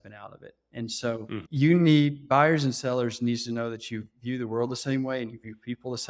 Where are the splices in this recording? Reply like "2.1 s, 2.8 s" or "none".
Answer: 1.5 s